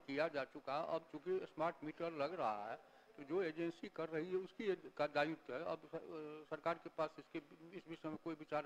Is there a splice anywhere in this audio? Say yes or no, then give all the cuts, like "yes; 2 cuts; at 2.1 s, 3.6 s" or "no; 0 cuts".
no; 0 cuts